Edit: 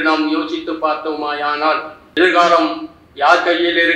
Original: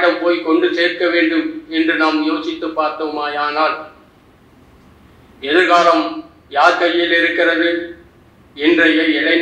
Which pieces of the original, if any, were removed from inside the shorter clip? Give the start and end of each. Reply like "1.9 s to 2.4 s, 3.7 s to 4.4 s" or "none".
4.1 s to 5.5 s